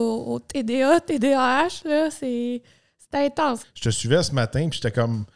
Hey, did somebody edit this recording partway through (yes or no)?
yes